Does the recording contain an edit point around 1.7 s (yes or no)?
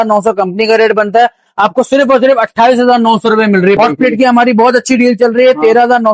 no